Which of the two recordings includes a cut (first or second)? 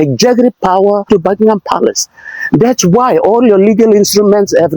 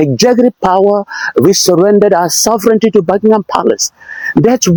first